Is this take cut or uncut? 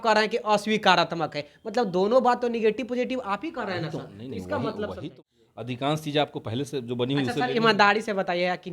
cut